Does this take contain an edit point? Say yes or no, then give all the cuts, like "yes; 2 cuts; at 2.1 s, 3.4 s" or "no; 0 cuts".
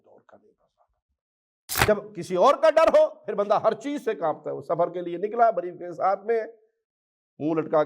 yes; 1 cut; at 1.9 s